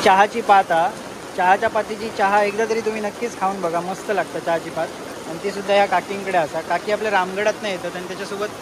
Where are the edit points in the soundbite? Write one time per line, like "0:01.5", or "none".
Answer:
none